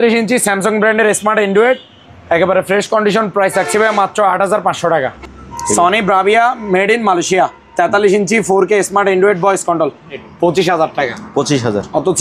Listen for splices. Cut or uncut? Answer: cut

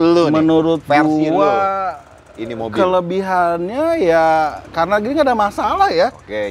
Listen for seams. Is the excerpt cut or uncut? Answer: uncut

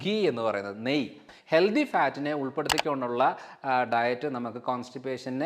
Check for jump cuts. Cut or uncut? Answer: cut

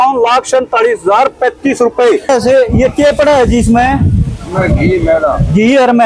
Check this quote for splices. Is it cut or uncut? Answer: cut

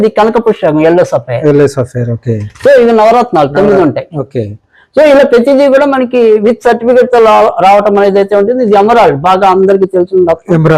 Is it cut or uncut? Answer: uncut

